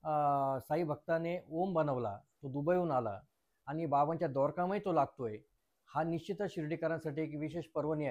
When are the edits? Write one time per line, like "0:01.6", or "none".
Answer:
none